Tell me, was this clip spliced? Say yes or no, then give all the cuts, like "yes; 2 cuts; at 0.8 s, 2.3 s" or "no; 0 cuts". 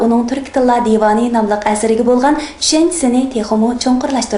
yes; 1 cut; at 3.2 s